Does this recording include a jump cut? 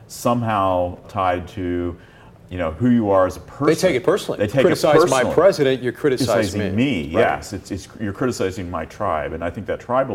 yes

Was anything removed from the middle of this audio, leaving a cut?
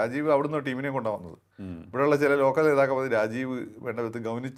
no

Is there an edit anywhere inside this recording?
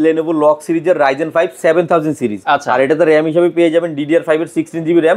no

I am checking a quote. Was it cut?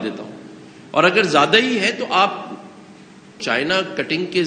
yes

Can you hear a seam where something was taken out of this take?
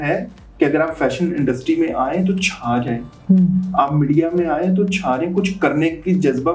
no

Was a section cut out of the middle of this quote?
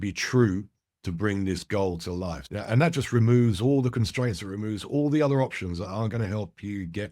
yes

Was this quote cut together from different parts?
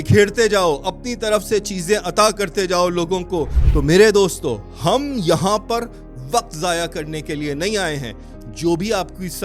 yes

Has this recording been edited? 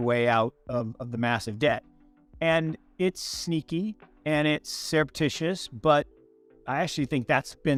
no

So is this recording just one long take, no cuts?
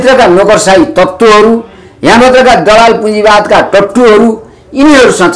yes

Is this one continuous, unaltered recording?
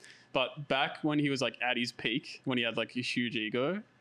yes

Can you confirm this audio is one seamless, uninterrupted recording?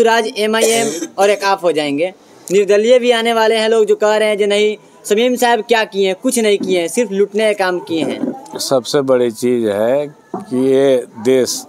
yes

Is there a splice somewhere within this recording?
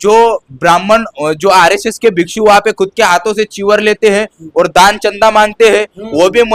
no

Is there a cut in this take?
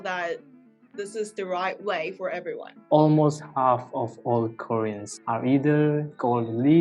yes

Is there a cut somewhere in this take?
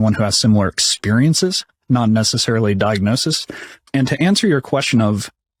no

